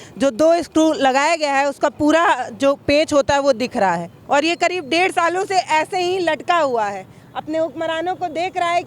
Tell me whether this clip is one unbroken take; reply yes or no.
no